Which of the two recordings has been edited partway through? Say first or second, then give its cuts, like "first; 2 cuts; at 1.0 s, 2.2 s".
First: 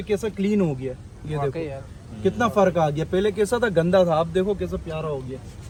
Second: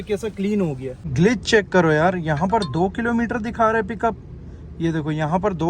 second; 1 cut; at 1.0 s